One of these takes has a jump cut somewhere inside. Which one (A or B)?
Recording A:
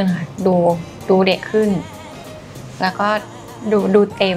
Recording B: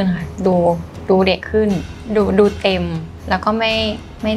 B